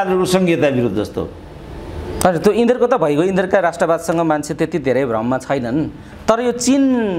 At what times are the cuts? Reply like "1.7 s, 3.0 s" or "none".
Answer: none